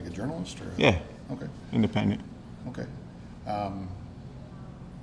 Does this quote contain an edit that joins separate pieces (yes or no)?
no